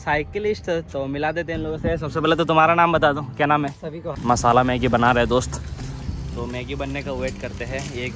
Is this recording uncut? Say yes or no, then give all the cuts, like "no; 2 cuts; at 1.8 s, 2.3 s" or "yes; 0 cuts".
no; 1 cut; at 4.1 s